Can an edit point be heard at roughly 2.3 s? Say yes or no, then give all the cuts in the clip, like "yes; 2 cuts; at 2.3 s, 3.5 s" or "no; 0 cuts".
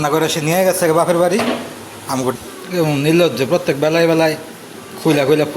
yes; 1 cut; at 2.3 s